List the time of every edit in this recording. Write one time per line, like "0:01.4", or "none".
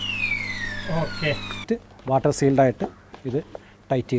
0:01.6